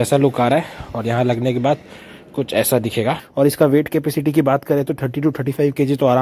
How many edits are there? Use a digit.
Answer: 1